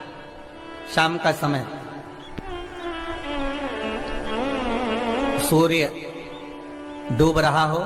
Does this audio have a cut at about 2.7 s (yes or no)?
no